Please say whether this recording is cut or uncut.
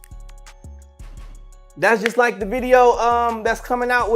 cut